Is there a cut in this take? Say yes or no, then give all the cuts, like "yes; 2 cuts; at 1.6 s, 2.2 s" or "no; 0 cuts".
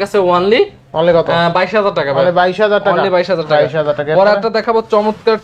no; 0 cuts